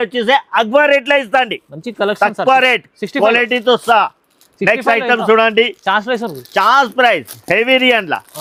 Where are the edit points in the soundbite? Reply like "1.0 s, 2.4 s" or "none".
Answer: none